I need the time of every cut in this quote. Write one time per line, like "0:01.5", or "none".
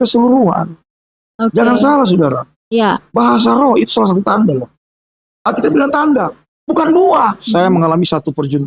0:07.4